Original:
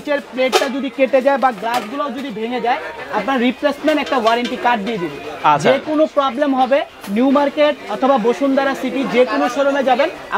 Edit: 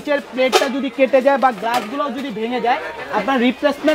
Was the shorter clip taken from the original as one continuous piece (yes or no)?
yes